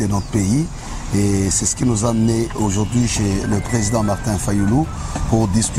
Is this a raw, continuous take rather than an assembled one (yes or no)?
yes